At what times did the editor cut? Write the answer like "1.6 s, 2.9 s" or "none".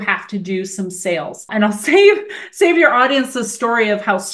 1.5 s